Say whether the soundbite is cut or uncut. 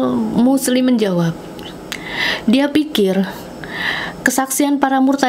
uncut